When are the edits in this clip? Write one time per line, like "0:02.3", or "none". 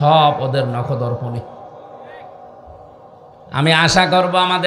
0:03.5